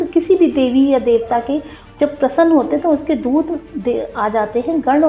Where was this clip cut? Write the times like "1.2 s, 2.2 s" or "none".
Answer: none